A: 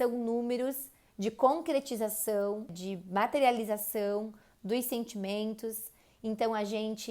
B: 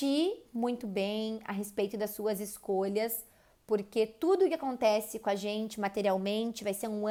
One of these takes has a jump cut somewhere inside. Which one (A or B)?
A